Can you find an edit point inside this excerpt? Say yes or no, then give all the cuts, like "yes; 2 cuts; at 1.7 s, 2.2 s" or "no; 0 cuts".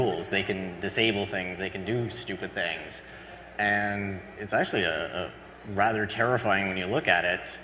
no; 0 cuts